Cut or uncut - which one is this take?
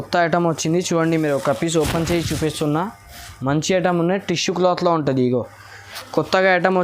cut